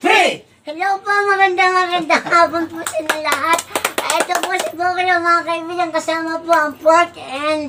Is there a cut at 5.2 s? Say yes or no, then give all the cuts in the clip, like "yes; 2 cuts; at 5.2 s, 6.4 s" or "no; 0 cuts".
no; 0 cuts